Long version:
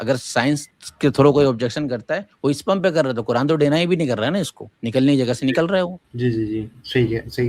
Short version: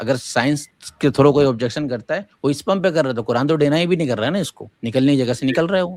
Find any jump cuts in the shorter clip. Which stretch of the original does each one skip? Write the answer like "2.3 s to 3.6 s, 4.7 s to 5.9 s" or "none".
none